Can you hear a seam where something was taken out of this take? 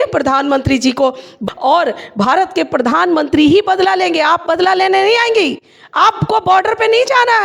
yes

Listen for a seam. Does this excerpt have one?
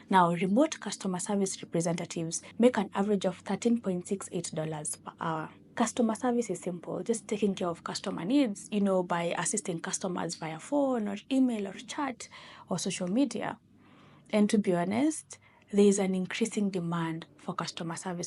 no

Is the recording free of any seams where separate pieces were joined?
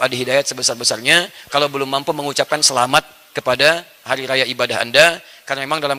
yes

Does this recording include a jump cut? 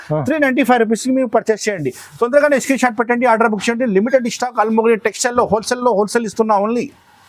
no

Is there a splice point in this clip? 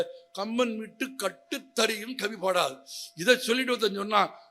no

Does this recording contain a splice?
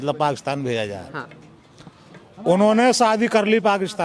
no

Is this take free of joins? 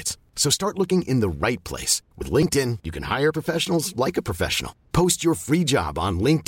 yes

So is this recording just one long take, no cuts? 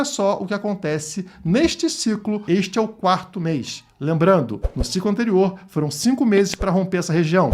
no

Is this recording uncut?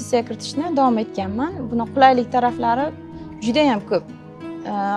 yes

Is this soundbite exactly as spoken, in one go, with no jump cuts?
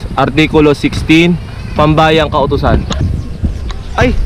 no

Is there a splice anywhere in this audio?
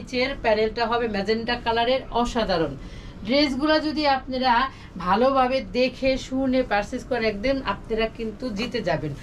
no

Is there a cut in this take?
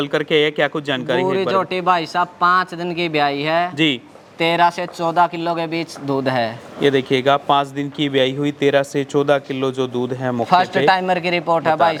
no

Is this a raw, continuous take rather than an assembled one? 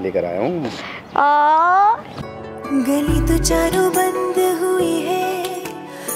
no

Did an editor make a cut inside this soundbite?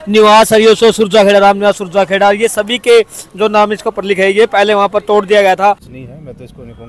yes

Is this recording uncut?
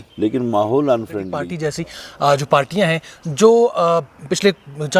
no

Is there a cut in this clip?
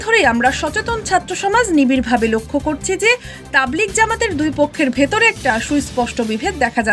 no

